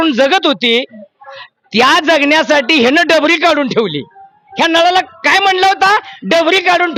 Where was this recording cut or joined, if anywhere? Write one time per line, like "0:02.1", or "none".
none